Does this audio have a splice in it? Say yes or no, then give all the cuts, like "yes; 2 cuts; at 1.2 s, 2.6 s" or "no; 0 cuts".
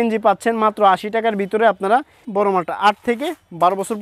yes; 1 cut; at 2.2 s